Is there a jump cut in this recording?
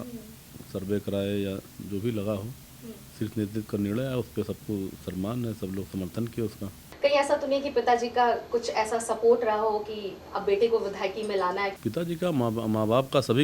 yes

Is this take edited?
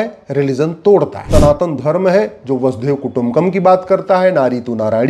yes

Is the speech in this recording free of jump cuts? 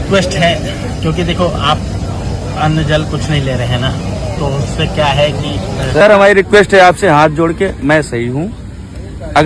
no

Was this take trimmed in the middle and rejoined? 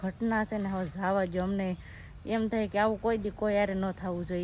no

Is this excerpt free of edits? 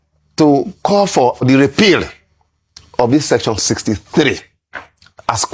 no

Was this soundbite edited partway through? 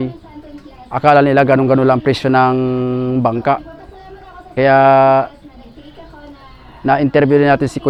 no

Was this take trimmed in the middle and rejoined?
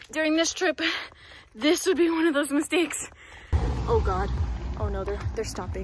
yes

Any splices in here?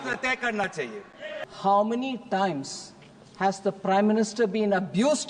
yes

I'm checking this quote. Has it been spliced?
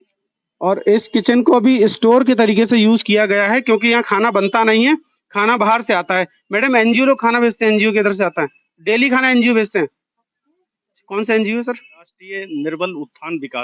no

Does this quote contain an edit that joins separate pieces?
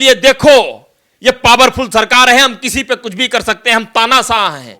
no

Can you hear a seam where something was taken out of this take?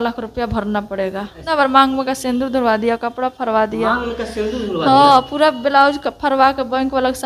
yes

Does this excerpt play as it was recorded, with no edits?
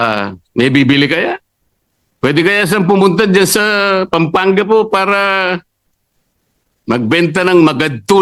yes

